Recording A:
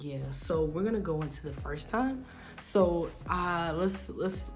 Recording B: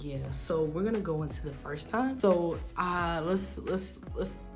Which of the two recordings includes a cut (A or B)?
B